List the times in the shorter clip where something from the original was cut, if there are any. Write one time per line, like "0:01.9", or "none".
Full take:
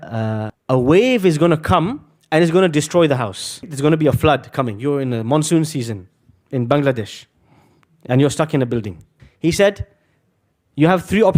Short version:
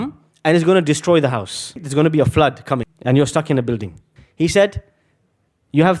0:02.9